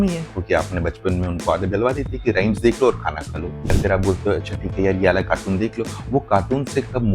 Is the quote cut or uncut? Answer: cut